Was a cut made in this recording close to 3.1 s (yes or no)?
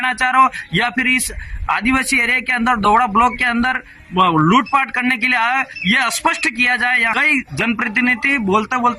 no